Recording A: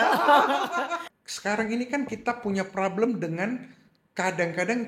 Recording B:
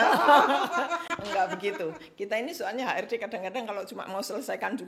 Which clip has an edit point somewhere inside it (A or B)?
A